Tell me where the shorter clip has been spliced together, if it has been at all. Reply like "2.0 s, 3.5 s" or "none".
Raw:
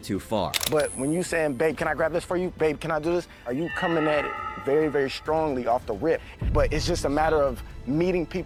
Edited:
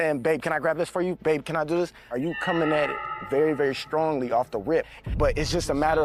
none